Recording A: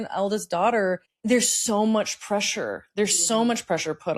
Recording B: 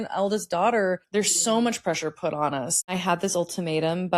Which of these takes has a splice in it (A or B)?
B